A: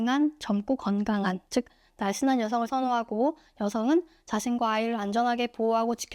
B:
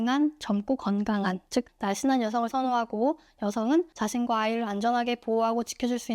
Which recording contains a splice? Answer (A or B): B